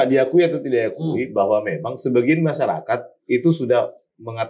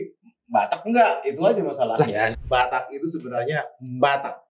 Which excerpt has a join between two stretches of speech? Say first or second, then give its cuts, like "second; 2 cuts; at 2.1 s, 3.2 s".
second; 1 cut; at 2.4 s